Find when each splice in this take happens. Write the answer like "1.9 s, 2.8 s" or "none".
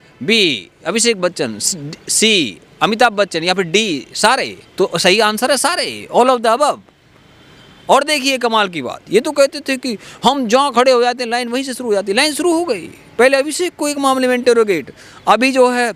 none